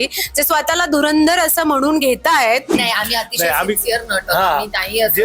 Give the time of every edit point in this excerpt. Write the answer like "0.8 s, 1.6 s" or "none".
2.7 s